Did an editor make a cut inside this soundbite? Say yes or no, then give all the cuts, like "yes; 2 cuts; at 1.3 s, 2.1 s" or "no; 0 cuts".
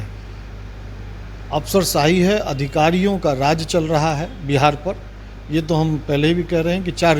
no; 0 cuts